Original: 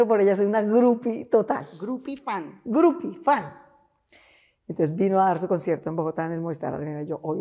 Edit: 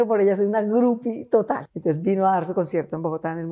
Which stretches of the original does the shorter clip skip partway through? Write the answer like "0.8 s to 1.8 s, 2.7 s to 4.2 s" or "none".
1.7 s to 4.6 s